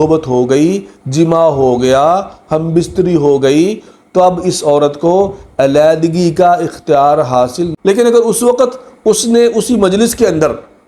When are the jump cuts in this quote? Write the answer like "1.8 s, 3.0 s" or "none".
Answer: 7.7 s